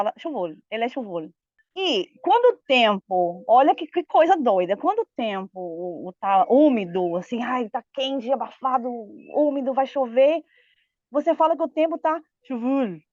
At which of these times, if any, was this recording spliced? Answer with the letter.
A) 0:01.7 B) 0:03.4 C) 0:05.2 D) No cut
A